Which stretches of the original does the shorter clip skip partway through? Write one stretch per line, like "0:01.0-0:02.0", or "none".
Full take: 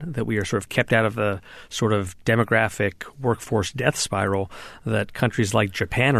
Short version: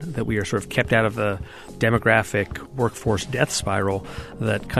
0:01.7-0:02.1